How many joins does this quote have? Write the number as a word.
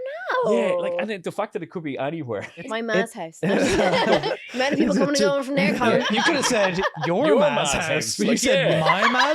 three